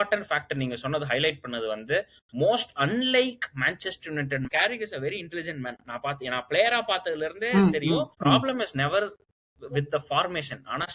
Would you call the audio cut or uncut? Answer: cut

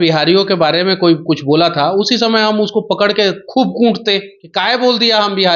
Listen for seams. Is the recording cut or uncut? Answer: cut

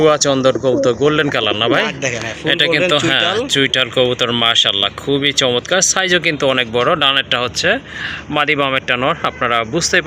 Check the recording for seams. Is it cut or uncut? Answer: uncut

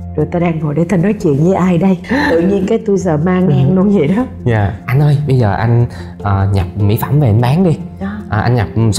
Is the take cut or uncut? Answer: cut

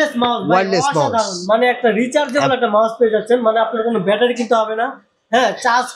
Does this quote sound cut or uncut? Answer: uncut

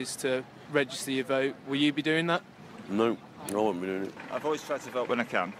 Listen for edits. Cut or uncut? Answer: cut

